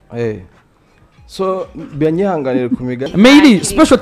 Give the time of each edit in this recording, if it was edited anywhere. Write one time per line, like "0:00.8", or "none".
0:03.1